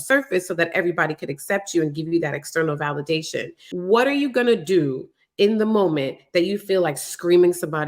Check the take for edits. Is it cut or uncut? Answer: cut